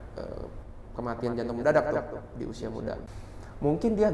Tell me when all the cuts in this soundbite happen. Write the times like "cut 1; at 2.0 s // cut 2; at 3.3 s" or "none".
cut 1; at 3.1 s